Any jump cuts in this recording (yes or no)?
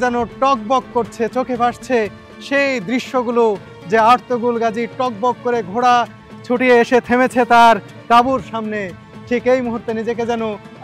no